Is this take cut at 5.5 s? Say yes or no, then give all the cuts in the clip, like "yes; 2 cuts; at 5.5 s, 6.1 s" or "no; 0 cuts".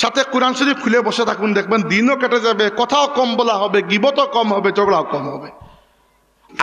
no; 0 cuts